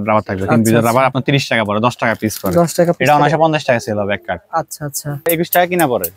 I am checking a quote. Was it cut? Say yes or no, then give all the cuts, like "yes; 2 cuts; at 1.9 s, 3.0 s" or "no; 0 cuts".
yes; 1 cut; at 5.3 s